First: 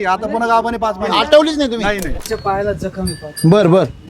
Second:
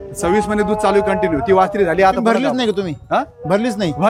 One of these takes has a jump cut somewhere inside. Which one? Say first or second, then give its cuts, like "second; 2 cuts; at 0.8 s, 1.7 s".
first; 1 cut; at 2.2 s